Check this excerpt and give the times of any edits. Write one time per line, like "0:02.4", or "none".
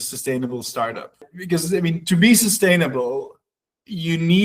0:01.3